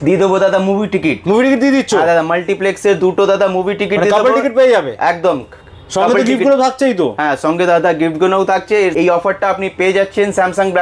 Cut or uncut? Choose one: uncut